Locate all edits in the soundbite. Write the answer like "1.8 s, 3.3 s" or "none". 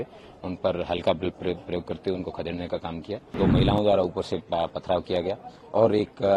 3.3 s